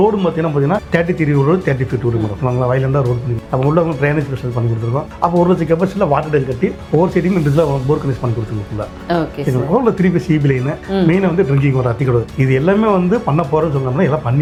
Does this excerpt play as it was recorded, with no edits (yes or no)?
yes